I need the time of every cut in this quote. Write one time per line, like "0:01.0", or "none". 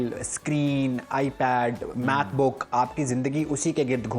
none